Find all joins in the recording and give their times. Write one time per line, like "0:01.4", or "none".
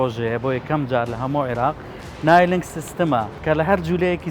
0:03.4